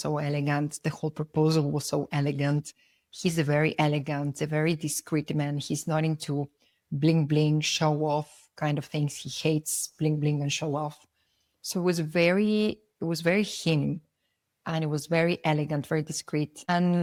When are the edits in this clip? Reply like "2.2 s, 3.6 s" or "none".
none